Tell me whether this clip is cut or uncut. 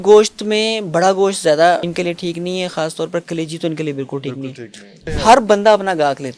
cut